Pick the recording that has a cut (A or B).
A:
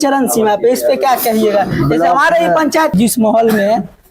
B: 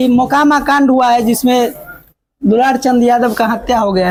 A